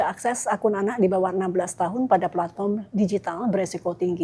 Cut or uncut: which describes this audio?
uncut